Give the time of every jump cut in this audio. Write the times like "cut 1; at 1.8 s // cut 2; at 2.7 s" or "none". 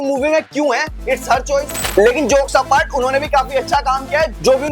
none

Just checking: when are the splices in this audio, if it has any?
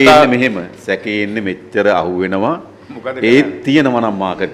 none

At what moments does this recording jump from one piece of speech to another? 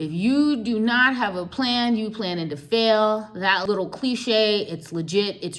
cut 1; at 3.6 s

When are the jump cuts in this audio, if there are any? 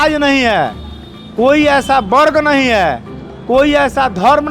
none

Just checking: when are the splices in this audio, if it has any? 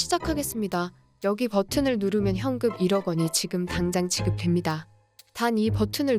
cut 1; at 1.0 s

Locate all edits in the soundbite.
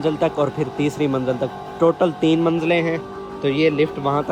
none

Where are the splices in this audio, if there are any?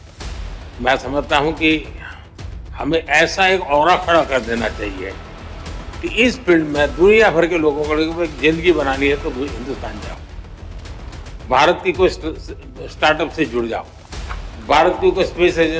none

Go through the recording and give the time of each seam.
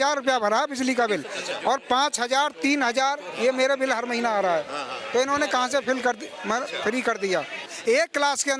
cut 1; at 7.7 s

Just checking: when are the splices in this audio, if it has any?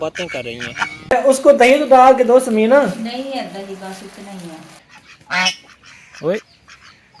cut 1; at 1.1 s // cut 2; at 4.9 s

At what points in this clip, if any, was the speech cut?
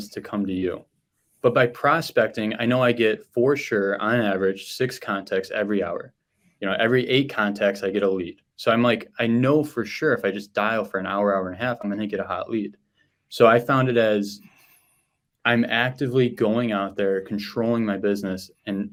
none

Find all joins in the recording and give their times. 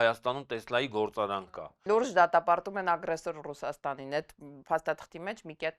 cut 1; at 1.8 s

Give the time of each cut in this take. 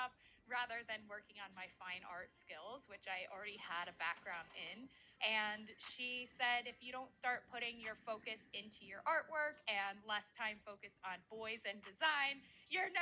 cut 1; at 5.1 s

